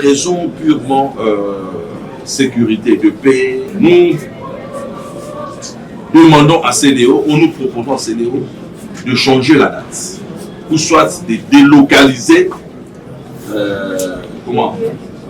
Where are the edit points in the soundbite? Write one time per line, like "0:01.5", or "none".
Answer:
0:03.7